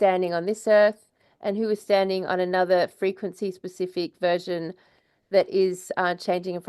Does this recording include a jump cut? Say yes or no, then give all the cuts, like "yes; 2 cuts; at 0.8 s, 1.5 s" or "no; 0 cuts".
no; 0 cuts